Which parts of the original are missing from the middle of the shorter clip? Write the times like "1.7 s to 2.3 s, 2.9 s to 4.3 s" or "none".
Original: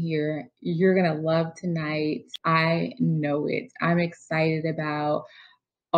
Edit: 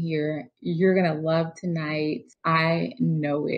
none